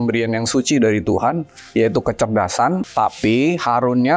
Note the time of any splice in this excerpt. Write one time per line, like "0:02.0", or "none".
0:02.8